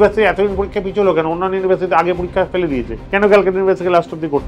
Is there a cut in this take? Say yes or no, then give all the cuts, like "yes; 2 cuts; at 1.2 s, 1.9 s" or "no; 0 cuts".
yes; 1 cut; at 3.0 s